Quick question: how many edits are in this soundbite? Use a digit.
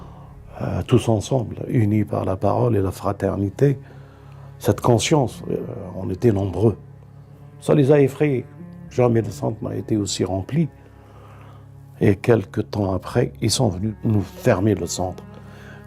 1